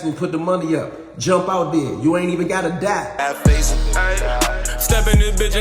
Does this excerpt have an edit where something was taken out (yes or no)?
yes